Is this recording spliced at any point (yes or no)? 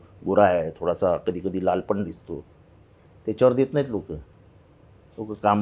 no